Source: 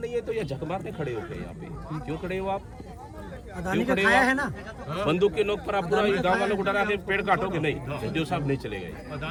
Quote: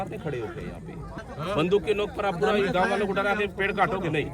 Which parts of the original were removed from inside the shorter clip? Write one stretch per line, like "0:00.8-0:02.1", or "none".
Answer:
0:01.9-0:04.7